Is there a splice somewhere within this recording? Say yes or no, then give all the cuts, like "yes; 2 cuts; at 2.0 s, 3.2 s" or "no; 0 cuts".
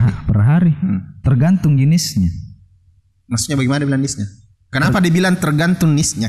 no; 0 cuts